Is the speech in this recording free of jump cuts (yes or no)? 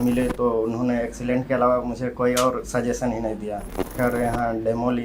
no